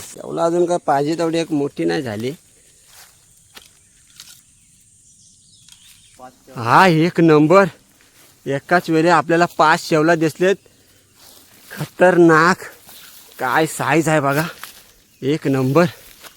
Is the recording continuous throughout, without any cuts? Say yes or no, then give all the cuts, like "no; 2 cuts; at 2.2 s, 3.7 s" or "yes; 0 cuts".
no; 1 cut; at 6.1 s